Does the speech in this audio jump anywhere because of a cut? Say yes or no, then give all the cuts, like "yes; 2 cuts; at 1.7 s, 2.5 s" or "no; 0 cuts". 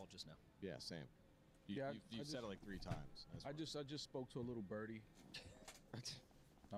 no; 0 cuts